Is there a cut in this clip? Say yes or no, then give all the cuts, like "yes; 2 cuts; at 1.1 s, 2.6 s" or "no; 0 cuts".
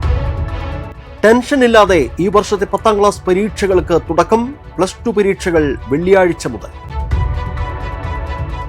yes; 1 cut; at 1.0 s